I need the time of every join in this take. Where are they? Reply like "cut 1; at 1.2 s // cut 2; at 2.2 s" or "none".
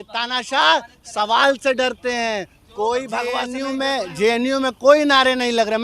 cut 1; at 3.5 s